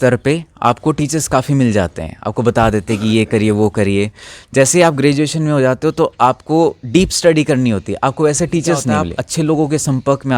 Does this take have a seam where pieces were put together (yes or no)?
yes